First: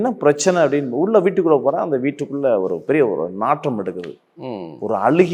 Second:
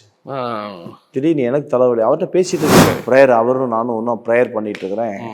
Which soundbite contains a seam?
second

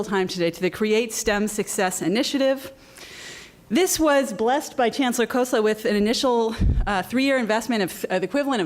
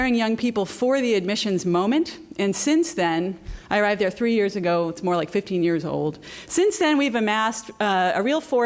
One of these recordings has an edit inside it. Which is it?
first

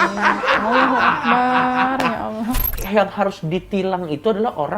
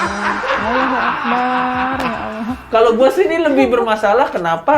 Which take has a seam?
first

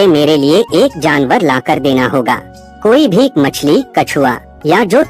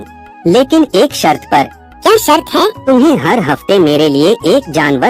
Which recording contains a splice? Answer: second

